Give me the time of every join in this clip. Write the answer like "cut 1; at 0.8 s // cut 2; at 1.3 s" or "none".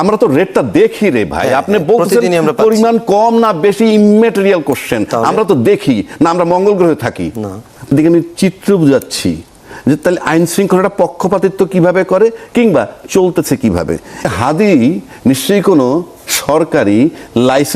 cut 1; at 7.9 s // cut 2; at 14.3 s